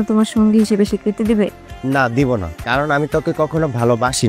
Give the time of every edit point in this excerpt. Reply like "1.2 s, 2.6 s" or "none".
none